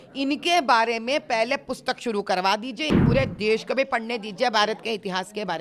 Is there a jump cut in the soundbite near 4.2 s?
no; 1 cut; at 3.0 s

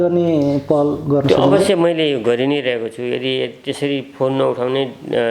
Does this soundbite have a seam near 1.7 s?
no; 0 cuts

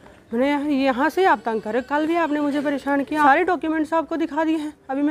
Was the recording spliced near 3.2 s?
yes; 1 cut; at 3.2 s

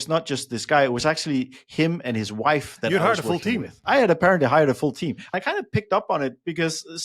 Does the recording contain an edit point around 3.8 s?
yes; 2 cuts; at 3.8 s, 5.3 s

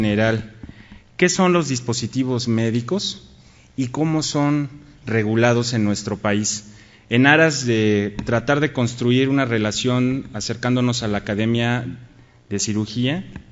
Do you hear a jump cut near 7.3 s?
no; 1 cut; at 11.4 s

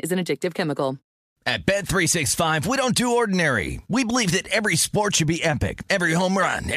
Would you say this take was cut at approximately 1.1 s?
yes; 1 cut; at 1.1 s

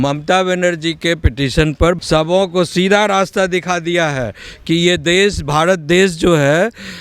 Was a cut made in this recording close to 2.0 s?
yes; 1 cut; at 2.0 s

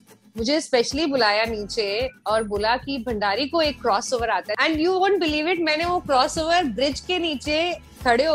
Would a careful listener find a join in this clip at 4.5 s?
yes; 1 cut; at 4.5 s

